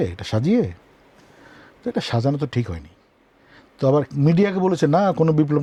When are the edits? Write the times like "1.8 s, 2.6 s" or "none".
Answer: none